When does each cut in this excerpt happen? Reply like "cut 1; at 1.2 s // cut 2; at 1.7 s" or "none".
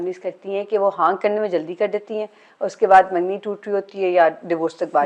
none